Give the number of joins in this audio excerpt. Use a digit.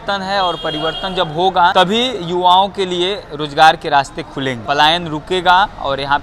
2